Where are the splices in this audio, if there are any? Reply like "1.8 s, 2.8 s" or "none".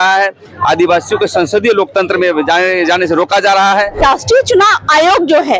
4.0 s